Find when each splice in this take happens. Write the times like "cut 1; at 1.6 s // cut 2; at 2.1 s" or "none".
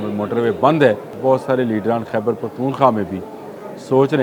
cut 1; at 1.1 s